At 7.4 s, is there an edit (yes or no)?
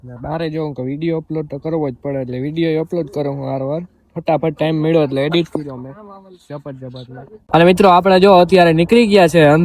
yes